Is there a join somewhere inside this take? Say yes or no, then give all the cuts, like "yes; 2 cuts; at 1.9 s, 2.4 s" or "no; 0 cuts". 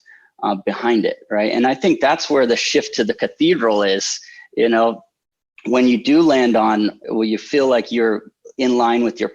yes; 1 cut; at 7.0 s